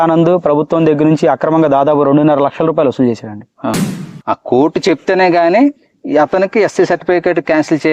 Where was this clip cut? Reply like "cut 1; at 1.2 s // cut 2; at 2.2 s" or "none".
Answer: cut 1; at 3.8 s